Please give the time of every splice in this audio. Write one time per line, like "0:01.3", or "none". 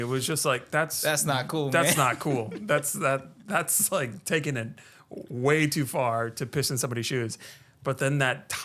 none